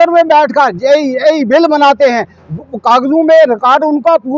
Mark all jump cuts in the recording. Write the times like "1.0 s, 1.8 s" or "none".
none